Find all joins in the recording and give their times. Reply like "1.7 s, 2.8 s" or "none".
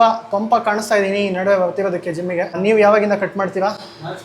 2.6 s